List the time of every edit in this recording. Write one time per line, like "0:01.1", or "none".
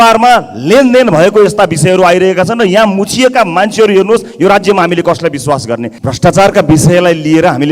0:05.9